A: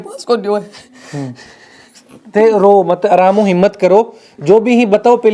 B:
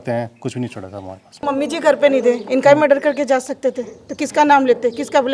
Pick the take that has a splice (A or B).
B